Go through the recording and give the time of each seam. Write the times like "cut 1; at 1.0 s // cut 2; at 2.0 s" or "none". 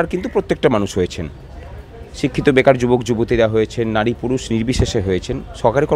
none